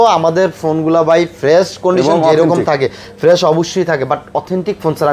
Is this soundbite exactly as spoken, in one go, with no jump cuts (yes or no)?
yes